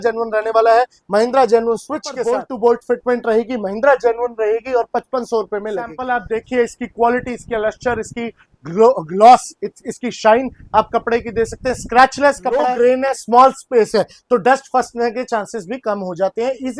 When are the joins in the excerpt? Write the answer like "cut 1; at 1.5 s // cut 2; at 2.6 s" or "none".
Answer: cut 1; at 2.2 s // cut 2; at 6.1 s // cut 3; at 12.6 s